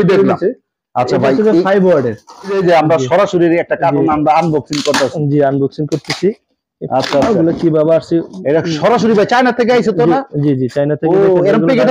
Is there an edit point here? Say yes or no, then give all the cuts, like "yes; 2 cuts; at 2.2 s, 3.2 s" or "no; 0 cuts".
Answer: yes; 1 cut; at 2.5 s